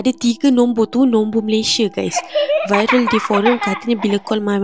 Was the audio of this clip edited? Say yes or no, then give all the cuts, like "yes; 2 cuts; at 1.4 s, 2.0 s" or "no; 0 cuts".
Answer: no; 0 cuts